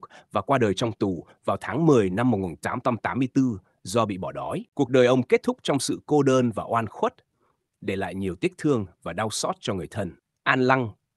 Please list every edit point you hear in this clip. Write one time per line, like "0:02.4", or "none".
0:04.6
0:10.3